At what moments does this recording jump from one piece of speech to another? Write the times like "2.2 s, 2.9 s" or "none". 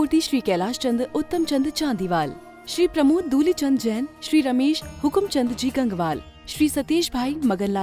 none